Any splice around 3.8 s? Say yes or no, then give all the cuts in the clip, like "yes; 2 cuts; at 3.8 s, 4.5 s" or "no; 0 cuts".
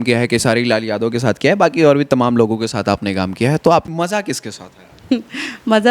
yes; 1 cut; at 3.8 s